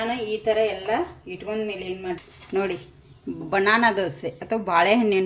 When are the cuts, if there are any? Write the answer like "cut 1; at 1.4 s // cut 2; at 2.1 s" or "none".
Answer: cut 1; at 2.2 s